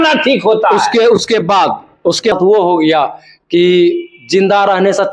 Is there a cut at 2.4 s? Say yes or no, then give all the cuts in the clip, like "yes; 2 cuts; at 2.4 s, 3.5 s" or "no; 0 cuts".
yes; 1 cut; at 2.4 s